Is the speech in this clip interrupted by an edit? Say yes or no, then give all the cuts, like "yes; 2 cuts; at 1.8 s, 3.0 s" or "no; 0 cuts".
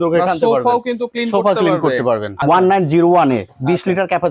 yes; 1 cut; at 2.3 s